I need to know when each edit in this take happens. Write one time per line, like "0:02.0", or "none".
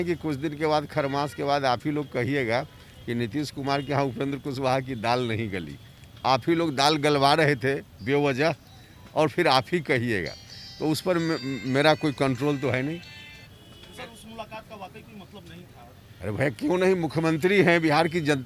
none